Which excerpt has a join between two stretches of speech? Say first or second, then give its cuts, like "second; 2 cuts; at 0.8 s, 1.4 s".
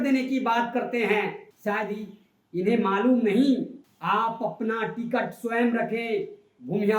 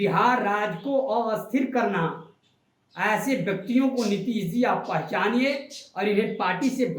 first; 2 cuts; at 1.5 s, 3.9 s